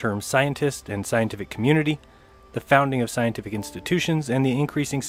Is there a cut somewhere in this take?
no; 0 cuts

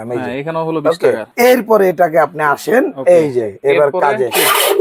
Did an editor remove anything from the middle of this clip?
yes; 1 cut; at 1.3 s

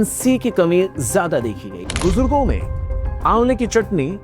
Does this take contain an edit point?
yes; 1 cut; at 1.8 s

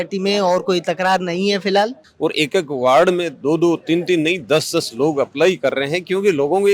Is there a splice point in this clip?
yes; 1 cut; at 2.0 s

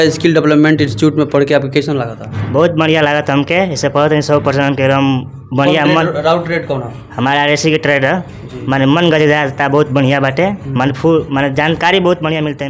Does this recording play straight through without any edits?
yes; 0 cuts

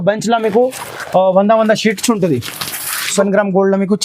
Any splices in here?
yes; 1 cut; at 3.1 s

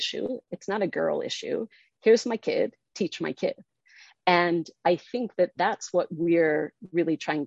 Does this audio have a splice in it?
no; 0 cuts

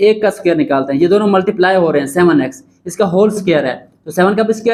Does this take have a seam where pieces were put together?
no; 0 cuts

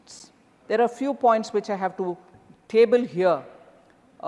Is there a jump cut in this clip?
no; 0 cuts

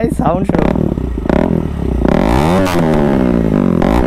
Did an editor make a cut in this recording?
no; 0 cuts

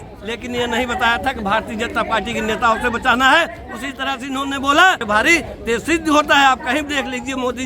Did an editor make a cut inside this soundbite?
yes; 1 cut; at 5.0 s

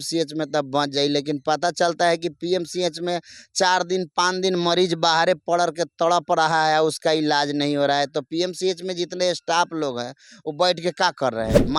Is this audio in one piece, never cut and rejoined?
yes; 0 cuts

